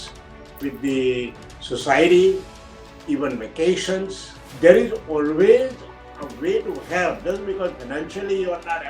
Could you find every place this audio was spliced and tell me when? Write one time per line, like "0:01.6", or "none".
0:04.4